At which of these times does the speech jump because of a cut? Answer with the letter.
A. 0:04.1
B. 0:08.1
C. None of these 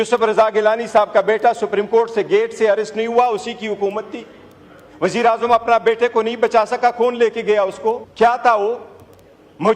B